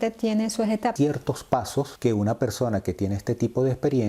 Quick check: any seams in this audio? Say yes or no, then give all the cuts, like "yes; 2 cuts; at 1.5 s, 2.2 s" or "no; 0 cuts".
yes; 2 cuts; at 0.9 s, 1.9 s